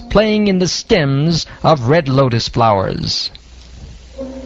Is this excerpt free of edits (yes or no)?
no